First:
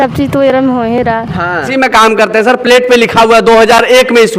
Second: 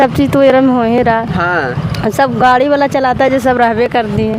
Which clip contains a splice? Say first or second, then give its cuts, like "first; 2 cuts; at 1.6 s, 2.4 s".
first; 1 cut; at 1.7 s